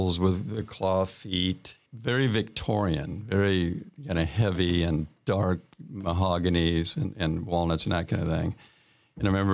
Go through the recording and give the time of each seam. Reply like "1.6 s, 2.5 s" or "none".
1.7 s